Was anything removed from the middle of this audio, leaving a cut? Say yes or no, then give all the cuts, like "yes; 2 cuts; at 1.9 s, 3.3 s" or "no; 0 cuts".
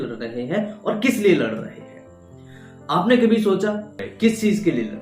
yes; 1 cut; at 4.0 s